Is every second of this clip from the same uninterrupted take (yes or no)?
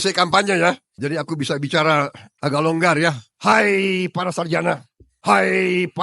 no